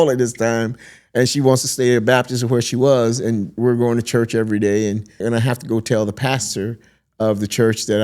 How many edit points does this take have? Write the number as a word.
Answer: one